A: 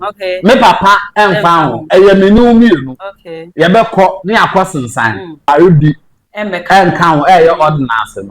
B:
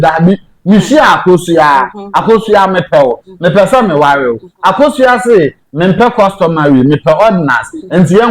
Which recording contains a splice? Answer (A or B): A